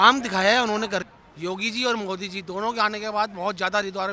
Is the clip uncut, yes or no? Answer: no